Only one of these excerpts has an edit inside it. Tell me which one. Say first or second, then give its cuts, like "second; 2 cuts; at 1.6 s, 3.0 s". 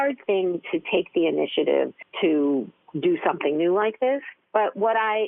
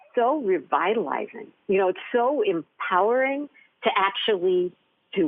first; 3 cuts; at 2.0 s, 2.8 s, 4.4 s